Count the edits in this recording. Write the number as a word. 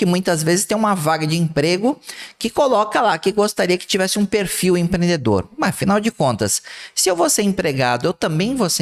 zero